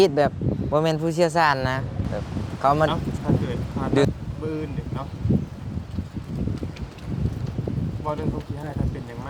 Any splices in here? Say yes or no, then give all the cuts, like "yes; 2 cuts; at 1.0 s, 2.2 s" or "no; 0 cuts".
yes; 1 cut; at 4.0 s